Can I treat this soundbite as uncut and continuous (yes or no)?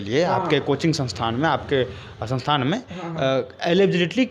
yes